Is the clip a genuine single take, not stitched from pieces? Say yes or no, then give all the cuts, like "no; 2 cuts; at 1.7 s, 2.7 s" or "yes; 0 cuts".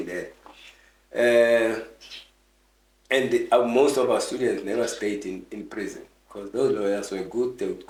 yes; 0 cuts